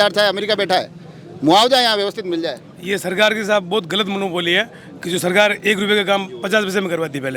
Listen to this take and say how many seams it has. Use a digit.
0